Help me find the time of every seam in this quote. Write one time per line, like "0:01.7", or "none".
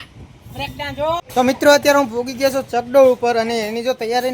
0:01.3